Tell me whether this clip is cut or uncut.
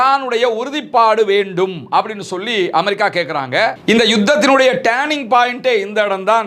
uncut